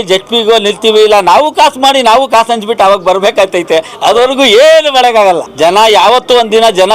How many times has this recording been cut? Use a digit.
1